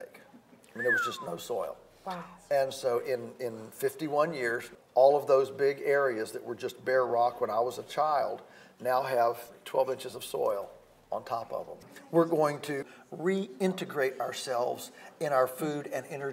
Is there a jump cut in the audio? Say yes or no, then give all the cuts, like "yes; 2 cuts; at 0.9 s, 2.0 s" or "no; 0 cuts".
yes; 3 cuts; at 4.7 s, 11.8 s, 12.9 s